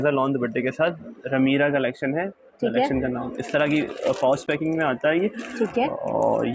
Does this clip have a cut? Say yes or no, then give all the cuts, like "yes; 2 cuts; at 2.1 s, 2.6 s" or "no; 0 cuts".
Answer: no; 0 cuts